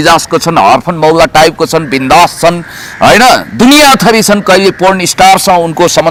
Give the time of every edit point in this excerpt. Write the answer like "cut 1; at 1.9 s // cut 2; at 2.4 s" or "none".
none